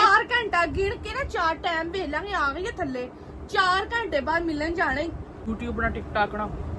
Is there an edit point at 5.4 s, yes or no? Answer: yes